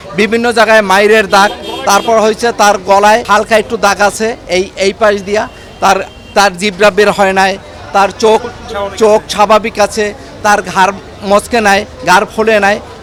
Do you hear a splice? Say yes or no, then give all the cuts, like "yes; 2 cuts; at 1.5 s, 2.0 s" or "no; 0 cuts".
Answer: no; 0 cuts